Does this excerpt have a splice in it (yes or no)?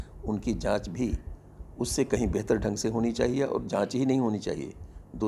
no